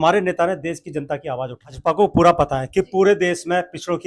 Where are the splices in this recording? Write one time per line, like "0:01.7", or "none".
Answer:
0:01.7